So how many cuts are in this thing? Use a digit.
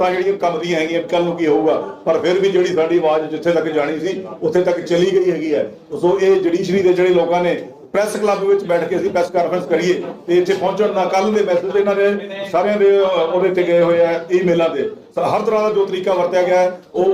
0